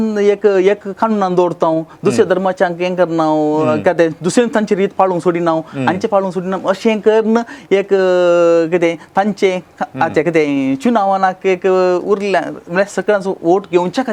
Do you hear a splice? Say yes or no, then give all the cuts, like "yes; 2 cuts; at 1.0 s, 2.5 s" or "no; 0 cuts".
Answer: no; 0 cuts